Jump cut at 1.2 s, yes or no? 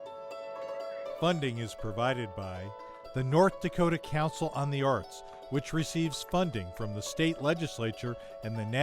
yes